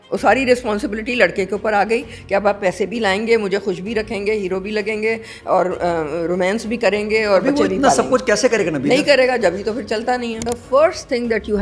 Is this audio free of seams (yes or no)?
no